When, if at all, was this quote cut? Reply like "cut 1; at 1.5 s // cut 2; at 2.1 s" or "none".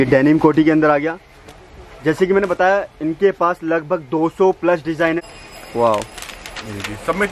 cut 1; at 5.2 s